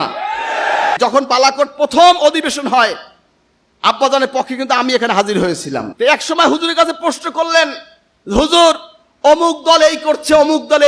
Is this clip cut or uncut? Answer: cut